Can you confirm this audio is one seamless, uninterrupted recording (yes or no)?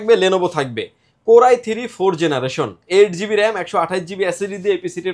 yes